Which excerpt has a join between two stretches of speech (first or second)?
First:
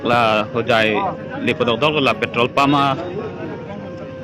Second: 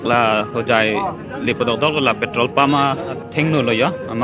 second